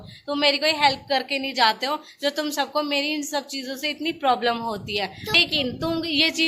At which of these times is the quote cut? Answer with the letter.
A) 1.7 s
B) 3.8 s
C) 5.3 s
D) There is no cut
C